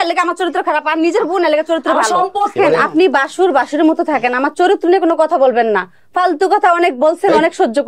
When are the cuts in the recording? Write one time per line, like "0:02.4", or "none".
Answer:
0:02.5